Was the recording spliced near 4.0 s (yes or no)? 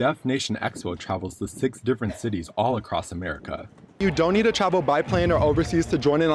yes